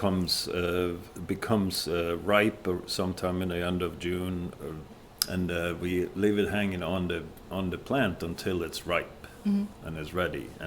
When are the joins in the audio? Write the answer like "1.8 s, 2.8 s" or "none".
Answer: 5.0 s